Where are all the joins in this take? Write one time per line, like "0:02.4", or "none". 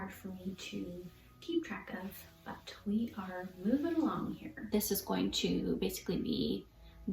0:04.6